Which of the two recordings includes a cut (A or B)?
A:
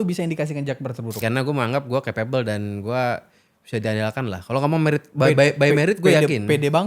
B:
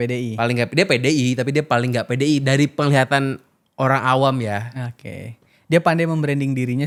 A